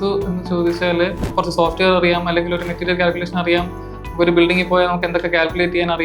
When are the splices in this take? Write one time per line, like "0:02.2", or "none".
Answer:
0:01.3